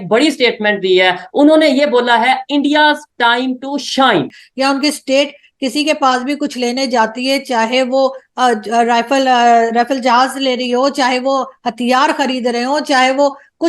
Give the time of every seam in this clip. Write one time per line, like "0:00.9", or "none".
0:04.4

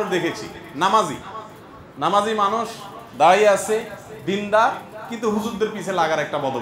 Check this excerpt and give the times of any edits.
none

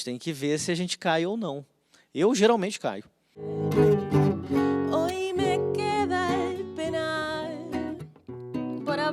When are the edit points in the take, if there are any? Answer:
0:03.6

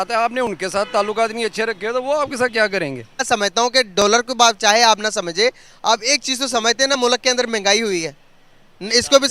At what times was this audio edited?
0:03.2

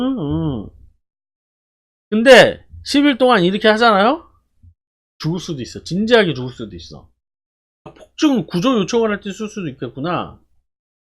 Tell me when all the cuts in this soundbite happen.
0:08.0

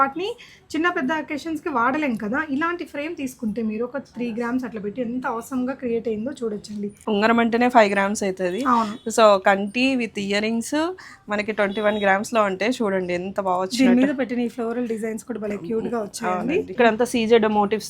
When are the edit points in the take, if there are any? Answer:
0:06.9
0:16.7

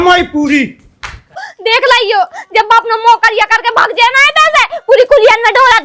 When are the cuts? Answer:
0:01.5

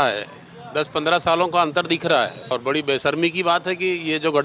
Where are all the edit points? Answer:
0:02.5

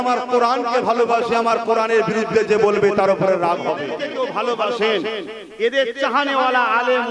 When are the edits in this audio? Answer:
0:04.0

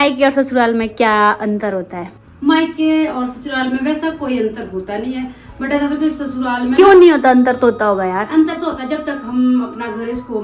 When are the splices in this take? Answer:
none

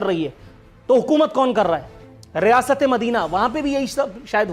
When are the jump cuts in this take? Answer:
0:01.9

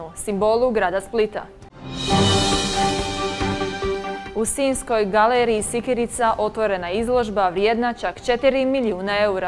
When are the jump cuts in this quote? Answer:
none

